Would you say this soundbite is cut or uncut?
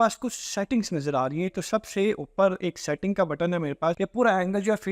cut